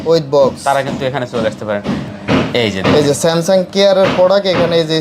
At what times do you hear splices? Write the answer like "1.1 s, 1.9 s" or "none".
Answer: 2.1 s